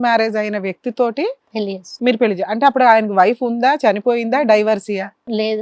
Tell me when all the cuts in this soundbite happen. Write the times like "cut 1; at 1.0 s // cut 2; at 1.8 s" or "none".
none